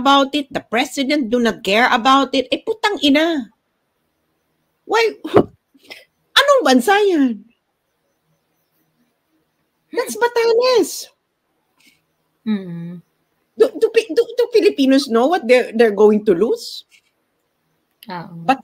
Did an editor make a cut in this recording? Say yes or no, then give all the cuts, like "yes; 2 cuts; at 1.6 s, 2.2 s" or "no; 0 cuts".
no; 0 cuts